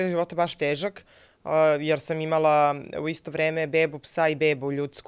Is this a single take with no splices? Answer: yes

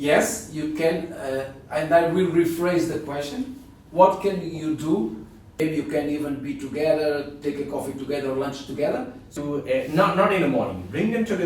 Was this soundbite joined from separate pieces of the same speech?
yes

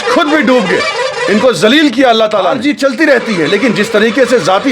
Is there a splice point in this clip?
yes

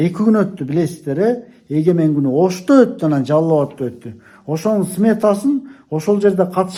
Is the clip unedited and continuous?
yes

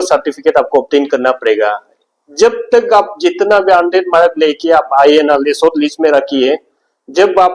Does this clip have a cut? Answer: no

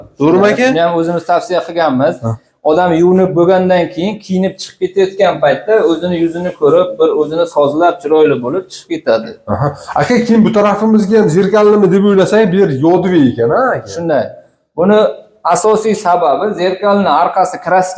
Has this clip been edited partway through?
no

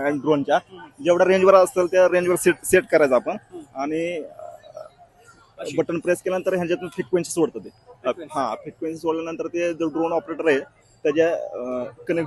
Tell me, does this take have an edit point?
no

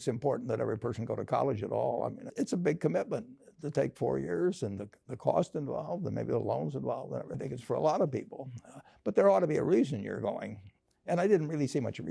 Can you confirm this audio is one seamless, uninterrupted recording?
no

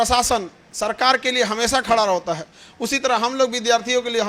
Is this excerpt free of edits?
yes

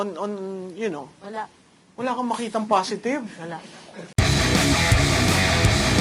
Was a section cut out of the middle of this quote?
no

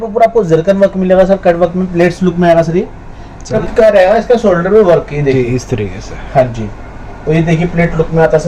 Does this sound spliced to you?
yes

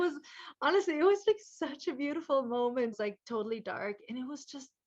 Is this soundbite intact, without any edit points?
no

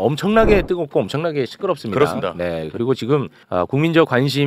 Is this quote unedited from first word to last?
no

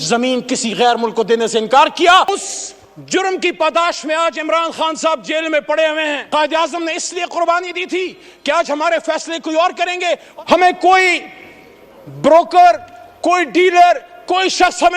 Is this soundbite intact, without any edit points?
no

